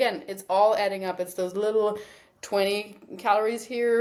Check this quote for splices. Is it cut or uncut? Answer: uncut